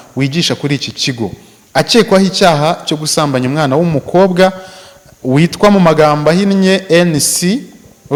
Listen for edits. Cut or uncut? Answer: uncut